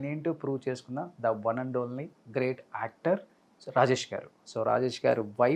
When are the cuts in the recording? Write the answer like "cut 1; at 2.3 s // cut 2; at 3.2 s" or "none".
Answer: cut 1; at 4.5 s